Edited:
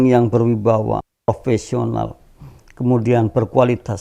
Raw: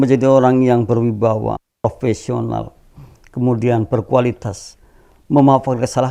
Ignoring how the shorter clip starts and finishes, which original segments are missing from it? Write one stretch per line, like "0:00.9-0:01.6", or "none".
none